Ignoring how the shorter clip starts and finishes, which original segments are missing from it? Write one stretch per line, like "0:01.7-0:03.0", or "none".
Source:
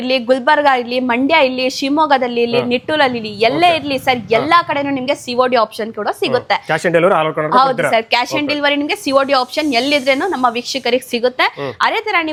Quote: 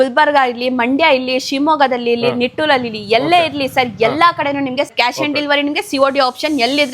0:05.2-0:08.1